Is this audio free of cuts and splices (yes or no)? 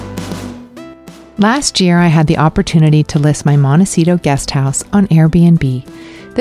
yes